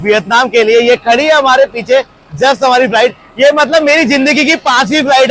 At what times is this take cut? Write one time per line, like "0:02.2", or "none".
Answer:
none